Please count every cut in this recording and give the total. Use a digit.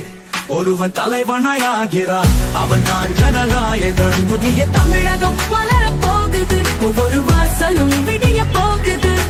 0